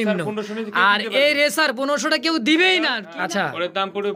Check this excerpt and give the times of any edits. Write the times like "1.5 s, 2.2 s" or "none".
3.0 s